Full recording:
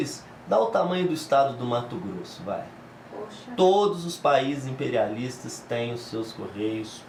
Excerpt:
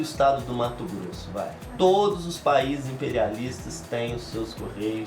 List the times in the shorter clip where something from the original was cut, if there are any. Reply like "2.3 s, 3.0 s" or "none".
1.6 s